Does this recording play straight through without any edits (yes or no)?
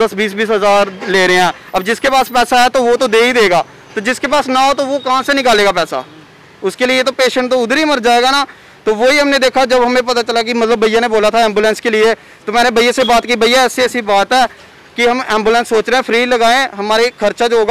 yes